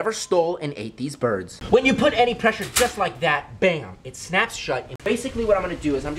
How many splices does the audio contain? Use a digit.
2